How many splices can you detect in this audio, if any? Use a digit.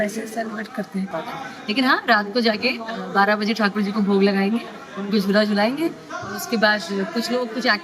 1